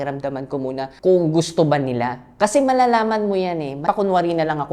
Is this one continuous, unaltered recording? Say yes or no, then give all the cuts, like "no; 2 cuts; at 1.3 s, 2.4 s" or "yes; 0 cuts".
no; 2 cuts; at 0.9 s, 3.8 s